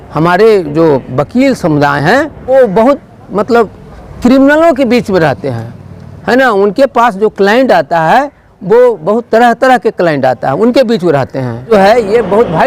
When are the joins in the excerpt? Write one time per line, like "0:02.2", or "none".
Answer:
0:02.5
0:11.7